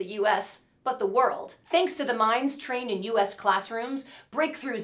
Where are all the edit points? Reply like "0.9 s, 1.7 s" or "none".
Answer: 1.5 s

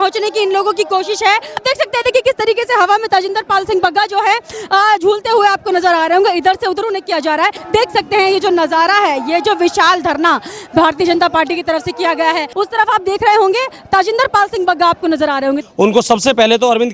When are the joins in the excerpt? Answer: 1.6 s, 7.6 s, 12.5 s, 15.6 s

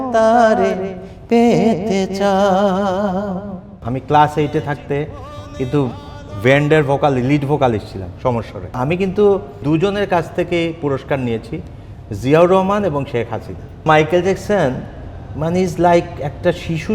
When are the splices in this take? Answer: 3.9 s, 8.7 s, 9.6 s, 13.9 s

